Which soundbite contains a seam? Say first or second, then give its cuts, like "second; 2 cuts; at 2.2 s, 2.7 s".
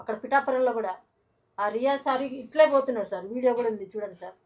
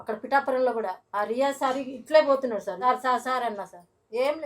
second; 2 cuts; at 1.0 s, 2.8 s